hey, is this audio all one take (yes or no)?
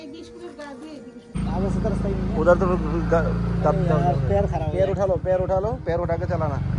no